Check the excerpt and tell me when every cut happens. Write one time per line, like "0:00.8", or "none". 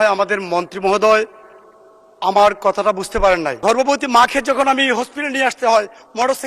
0:03.6